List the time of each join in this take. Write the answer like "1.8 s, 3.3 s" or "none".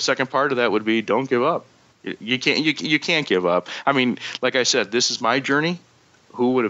1.8 s